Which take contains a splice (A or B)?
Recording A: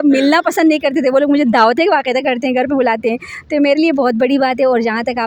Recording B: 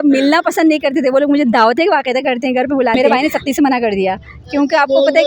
B